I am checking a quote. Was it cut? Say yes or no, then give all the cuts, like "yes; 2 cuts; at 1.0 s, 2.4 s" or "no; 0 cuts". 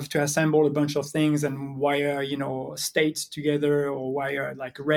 no; 0 cuts